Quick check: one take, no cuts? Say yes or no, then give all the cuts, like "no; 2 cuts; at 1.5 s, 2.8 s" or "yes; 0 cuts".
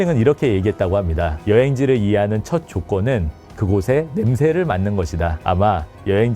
no; 1 cut; at 5.4 s